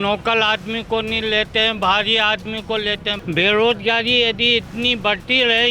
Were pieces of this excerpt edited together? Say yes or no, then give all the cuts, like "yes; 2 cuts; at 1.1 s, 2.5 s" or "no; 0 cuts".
yes; 1 cut; at 3.1 s